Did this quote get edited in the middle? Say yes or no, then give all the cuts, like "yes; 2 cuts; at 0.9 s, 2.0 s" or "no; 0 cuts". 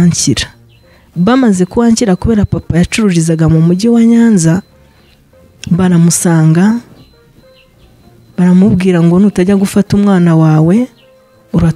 no; 0 cuts